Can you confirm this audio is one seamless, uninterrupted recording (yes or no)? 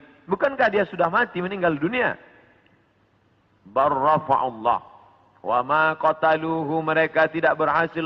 yes